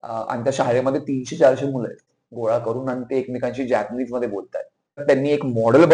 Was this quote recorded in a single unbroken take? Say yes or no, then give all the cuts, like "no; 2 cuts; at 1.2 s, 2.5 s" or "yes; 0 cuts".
no; 2 cuts; at 2.1 s, 5.0 s